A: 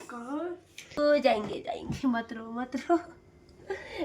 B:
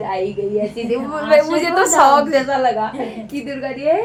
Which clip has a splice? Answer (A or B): A